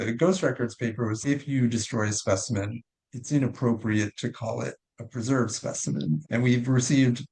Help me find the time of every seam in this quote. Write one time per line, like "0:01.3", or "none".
0:01.2